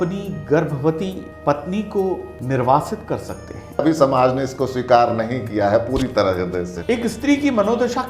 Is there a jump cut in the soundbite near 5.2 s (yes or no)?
no